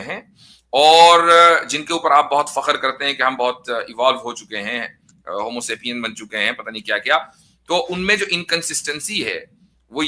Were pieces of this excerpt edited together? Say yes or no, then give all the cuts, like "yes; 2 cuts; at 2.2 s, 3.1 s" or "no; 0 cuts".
no; 0 cuts